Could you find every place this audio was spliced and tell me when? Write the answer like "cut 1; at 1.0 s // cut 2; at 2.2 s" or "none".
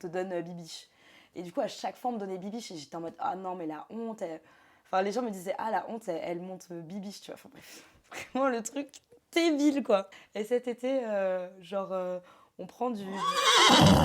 cut 1; at 10.1 s // cut 2; at 13.2 s